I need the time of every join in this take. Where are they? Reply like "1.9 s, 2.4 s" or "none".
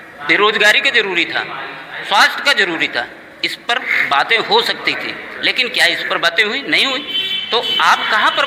none